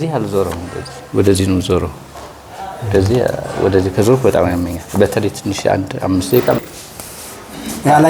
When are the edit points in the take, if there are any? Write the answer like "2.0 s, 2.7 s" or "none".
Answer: 6.6 s